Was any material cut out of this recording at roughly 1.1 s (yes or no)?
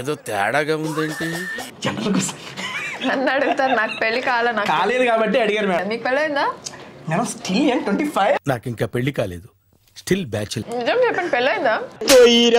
no